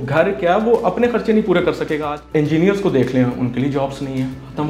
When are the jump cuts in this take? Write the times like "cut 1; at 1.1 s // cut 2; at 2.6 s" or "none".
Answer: cut 1; at 2.1 s